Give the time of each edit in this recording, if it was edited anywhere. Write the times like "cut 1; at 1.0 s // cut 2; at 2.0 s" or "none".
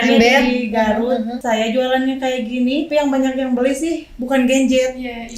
cut 1; at 1.4 s // cut 2; at 2.9 s